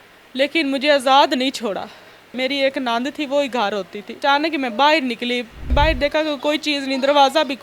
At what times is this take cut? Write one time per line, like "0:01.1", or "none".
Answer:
0:02.3
0:04.2
0:05.7